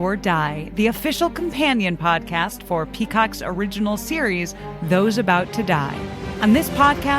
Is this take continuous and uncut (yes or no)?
no